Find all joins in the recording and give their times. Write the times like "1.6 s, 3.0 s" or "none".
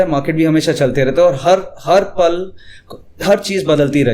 none